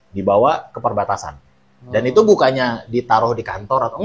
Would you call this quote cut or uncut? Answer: uncut